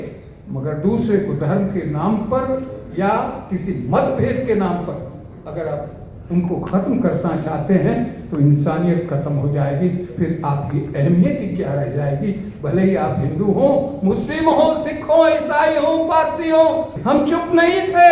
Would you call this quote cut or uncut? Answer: cut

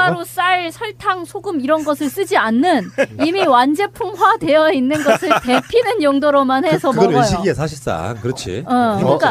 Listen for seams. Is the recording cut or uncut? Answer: cut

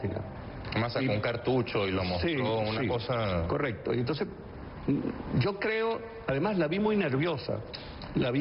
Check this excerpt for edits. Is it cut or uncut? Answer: cut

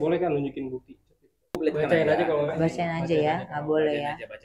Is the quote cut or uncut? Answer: cut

